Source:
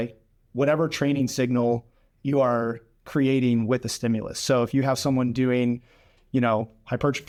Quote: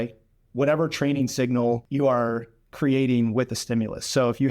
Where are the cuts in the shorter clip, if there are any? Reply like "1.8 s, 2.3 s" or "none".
1.9 s